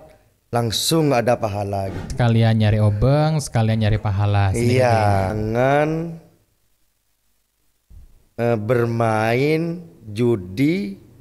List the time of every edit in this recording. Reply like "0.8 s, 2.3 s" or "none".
2.1 s, 5.3 s